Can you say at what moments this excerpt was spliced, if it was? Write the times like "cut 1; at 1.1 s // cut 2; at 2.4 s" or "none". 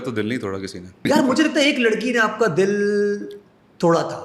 cut 1; at 1.0 s

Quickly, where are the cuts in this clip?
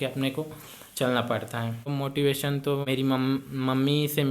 cut 1; at 1.9 s // cut 2; at 2.9 s

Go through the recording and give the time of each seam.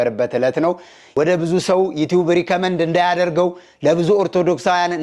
cut 1; at 1.0 s

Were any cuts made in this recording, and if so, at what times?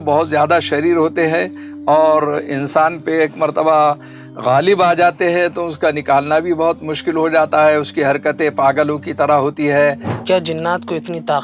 cut 1; at 10.1 s

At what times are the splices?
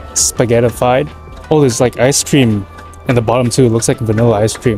none

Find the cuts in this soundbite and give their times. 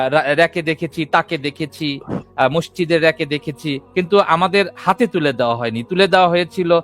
cut 1; at 3.8 s

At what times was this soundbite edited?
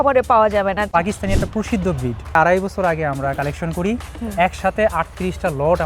cut 1; at 0.9 s // cut 2; at 2.4 s

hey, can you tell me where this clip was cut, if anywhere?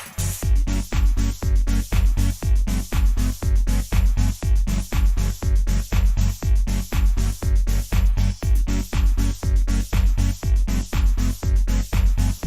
cut 1; at 9.8 s

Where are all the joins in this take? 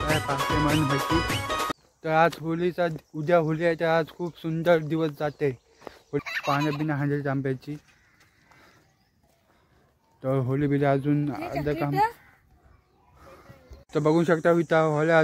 cut 1; at 1.6 s // cut 2; at 6.2 s

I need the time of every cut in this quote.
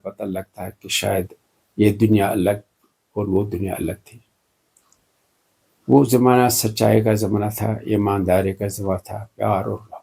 none

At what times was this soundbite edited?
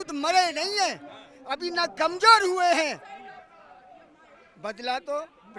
none

